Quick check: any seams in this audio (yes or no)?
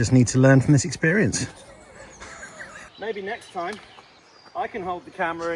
yes